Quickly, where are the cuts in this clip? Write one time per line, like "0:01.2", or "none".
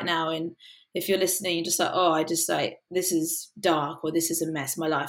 none